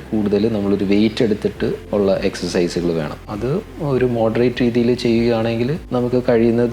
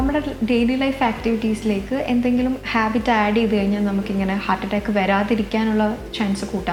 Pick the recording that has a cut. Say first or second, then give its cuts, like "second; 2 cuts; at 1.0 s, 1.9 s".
first; 3 cuts; at 1.8 s, 3.2 s, 5.8 s